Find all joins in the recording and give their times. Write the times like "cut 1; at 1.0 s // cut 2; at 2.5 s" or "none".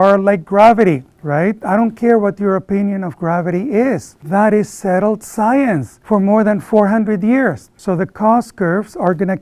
none